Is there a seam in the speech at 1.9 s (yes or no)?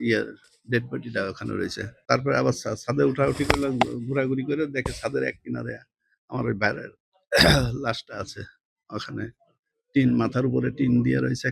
yes